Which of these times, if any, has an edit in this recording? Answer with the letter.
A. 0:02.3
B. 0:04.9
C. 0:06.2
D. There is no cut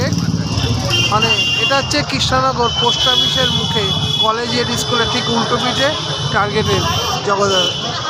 D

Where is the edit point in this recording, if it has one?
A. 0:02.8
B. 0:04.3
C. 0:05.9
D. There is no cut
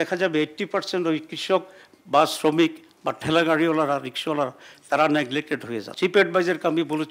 C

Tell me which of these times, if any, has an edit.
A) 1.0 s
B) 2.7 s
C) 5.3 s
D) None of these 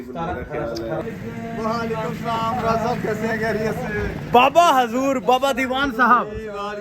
A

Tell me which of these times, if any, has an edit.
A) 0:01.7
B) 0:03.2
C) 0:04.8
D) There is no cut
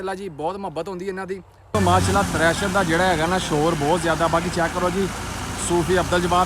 A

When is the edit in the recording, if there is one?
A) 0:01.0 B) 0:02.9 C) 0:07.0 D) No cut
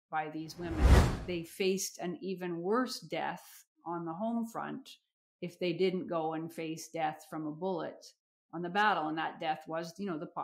A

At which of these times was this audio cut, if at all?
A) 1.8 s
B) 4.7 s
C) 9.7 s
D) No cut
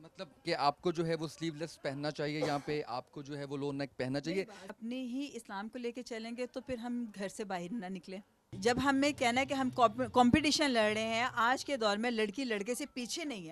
B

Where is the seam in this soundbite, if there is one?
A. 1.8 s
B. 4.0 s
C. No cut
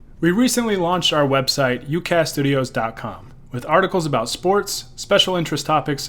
C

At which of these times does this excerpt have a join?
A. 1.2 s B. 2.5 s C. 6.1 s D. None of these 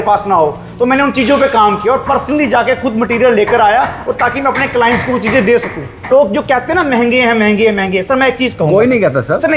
C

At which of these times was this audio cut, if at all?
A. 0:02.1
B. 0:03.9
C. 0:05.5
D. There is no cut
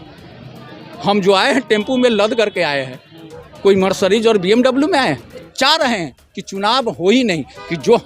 C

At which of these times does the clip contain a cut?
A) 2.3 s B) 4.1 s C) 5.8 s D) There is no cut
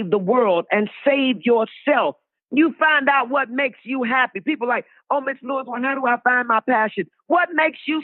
A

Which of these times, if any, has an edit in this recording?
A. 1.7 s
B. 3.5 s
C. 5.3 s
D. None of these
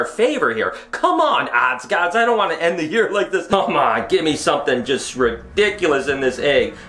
B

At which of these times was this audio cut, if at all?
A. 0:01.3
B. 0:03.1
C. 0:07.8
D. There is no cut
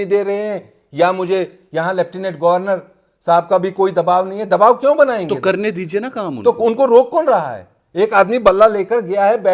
D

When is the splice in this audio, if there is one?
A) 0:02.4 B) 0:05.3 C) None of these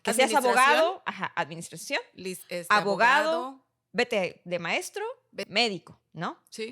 B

